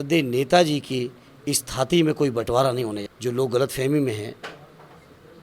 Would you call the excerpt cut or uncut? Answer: cut